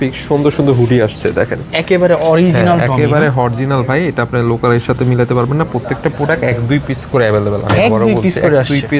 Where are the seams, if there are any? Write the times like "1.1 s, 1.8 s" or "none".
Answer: none